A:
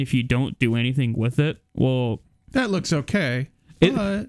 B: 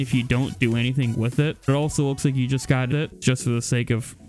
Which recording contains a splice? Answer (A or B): B